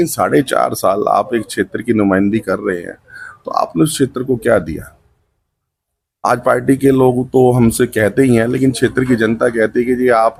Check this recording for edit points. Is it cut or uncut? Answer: uncut